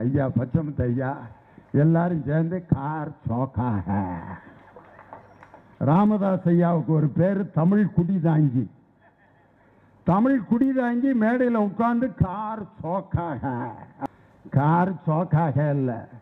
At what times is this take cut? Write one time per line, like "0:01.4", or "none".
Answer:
0:05.7
0:14.1